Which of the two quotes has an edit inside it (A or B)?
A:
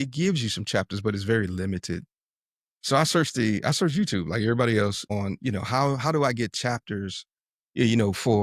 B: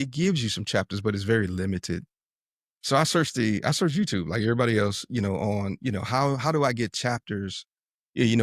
A